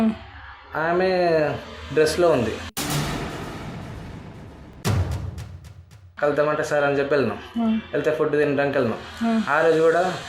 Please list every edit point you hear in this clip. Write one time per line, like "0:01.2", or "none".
0:06.1

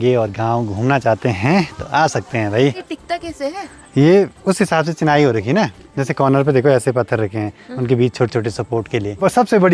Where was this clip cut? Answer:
none

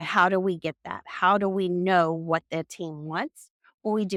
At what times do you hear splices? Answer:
none

